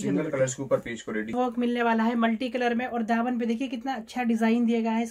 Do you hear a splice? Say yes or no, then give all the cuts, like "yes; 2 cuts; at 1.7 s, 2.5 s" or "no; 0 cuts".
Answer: yes; 1 cut; at 1.3 s